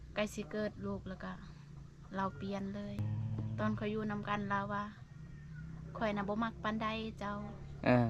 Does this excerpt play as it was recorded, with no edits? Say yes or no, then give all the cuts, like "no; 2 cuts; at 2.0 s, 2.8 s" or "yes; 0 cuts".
no; 1 cut; at 3.0 s